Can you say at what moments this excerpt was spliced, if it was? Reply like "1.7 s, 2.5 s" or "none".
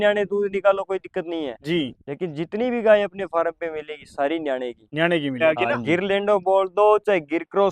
5.3 s

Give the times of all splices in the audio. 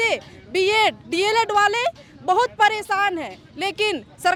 none

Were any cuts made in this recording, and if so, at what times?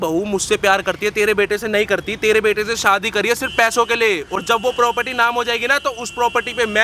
none

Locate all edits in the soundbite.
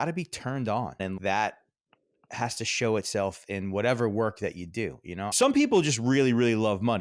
1.1 s, 5.3 s

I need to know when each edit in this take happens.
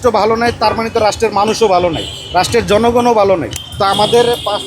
3.6 s

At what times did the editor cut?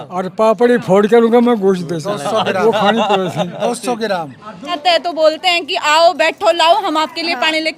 4.8 s

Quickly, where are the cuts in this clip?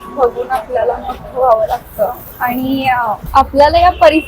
3.2 s

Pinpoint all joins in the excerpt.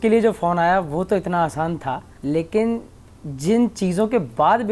2.1 s

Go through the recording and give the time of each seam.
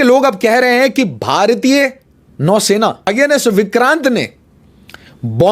3.0 s

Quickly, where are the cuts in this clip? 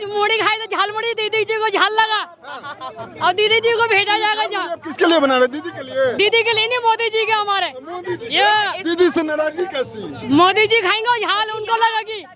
none

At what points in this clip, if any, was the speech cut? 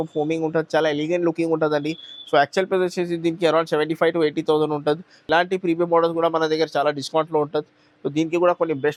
none

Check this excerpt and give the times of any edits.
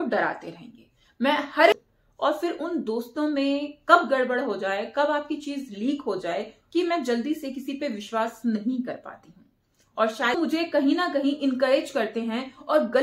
1.7 s, 6.6 s, 10.4 s

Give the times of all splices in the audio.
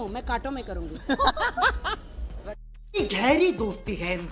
3.0 s

